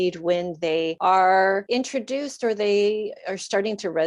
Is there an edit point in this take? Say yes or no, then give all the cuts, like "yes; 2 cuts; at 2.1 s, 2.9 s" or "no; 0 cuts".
yes; 2 cuts; at 0.9 s, 1.6 s